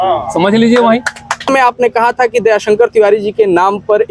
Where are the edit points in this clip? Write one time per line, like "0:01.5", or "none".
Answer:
0:01.5